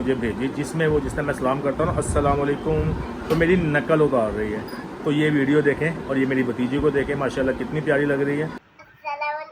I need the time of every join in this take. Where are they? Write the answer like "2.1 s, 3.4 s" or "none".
4.7 s, 8.6 s